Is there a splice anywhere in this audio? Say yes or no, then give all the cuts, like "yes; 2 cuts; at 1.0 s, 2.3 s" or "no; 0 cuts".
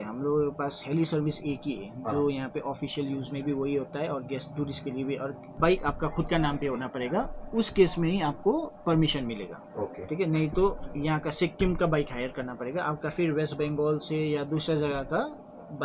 yes; 1 cut; at 5.4 s